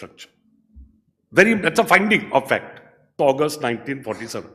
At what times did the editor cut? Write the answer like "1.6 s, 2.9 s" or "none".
3.1 s